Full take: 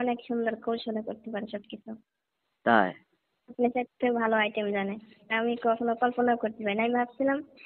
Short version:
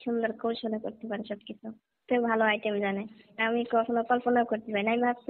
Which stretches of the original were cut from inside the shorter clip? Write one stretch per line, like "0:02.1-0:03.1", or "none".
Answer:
0:02.2-0:03.9